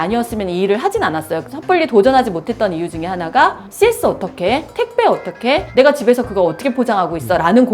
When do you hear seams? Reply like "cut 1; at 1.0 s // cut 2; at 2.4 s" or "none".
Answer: cut 1; at 1.4 s